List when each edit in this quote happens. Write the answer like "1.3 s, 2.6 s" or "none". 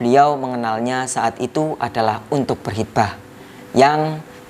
none